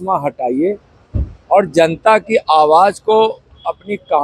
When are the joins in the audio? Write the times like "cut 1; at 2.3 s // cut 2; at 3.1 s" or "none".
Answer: none